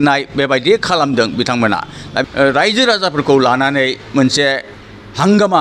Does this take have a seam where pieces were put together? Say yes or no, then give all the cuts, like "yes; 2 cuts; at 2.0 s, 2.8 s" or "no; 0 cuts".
yes; 1 cut; at 2.2 s